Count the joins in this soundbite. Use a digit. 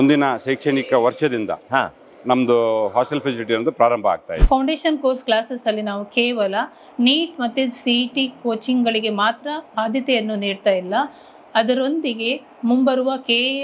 1